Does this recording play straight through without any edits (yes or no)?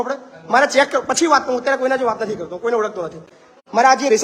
yes